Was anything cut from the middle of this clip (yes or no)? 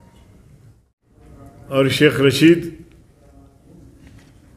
yes